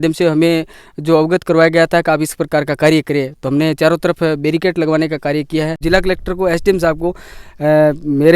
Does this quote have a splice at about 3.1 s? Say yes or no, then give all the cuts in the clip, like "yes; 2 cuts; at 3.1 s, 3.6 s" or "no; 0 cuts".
no; 1 cut; at 5.8 s